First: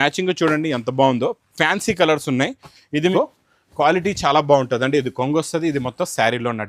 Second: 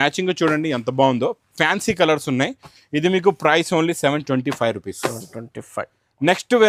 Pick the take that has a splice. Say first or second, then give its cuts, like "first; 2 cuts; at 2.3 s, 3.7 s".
first; 1 cut; at 3.1 s